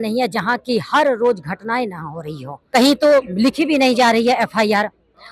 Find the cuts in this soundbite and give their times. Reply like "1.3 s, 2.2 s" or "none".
2.5 s